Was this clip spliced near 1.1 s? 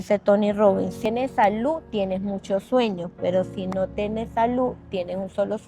yes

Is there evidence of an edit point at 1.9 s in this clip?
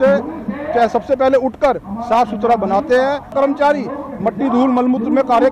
no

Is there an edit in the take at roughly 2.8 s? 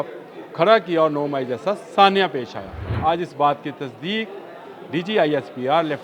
yes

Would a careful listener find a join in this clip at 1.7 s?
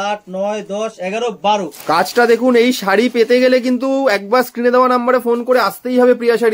yes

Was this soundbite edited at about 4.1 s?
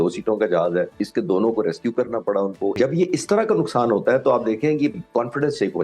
no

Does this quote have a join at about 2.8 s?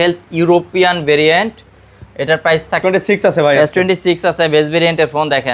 yes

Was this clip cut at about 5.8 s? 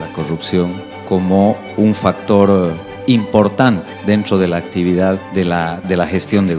yes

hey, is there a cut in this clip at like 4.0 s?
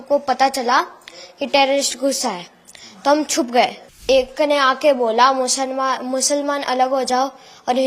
yes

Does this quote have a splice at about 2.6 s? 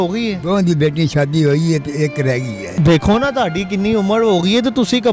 yes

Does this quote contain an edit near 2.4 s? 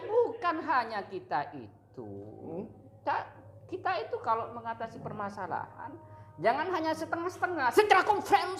no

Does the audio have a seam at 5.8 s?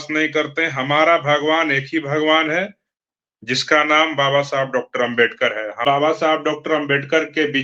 yes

